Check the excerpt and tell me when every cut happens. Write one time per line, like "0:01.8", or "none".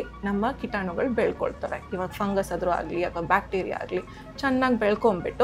none